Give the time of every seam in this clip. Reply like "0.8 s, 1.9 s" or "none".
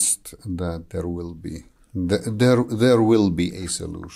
none